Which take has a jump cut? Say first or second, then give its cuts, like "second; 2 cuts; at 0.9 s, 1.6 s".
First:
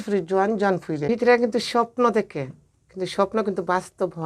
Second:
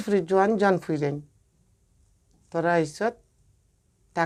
first; 1 cut; at 1.0 s